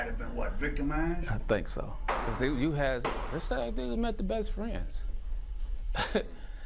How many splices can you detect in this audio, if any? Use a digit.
0